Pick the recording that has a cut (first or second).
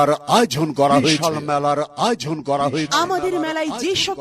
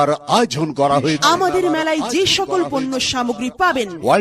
second